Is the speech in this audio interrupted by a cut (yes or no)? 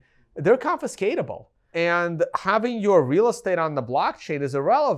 yes